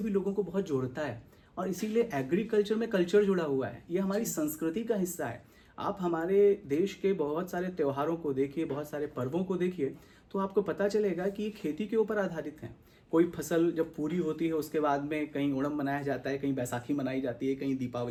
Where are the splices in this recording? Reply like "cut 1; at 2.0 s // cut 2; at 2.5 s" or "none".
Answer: none